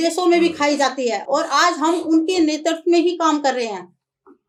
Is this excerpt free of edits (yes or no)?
yes